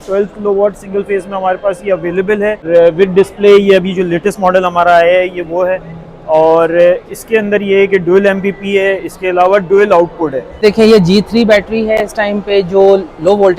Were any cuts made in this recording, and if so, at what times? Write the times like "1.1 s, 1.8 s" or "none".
2.7 s, 10.6 s